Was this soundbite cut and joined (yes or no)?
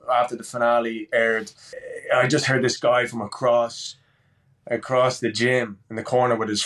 yes